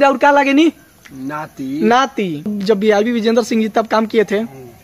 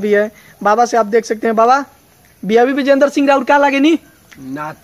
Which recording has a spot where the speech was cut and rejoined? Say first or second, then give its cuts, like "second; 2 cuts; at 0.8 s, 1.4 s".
first; 1 cut; at 2.6 s